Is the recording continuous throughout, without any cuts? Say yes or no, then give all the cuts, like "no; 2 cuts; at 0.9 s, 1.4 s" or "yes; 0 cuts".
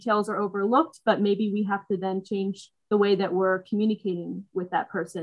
yes; 0 cuts